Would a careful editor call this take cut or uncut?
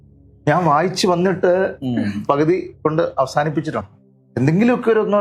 cut